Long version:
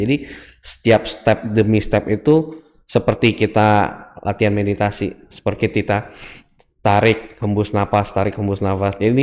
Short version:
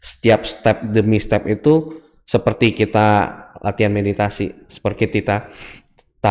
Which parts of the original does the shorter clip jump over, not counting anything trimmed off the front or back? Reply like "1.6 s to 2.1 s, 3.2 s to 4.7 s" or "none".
none